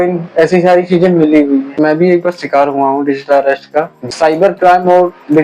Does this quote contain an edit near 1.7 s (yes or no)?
yes